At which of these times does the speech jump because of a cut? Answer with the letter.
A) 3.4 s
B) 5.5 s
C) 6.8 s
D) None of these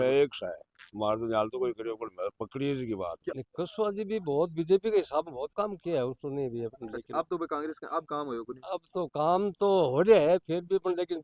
A